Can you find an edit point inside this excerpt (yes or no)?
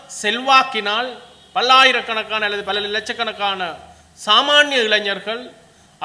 no